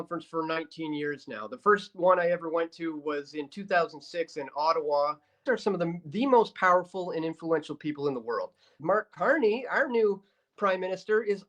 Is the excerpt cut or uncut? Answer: cut